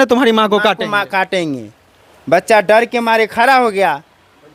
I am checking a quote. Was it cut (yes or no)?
no